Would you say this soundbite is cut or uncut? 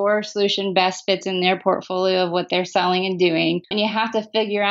cut